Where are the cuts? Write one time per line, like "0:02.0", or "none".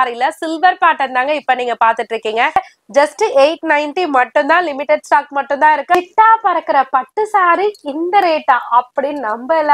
0:02.6
0:05.9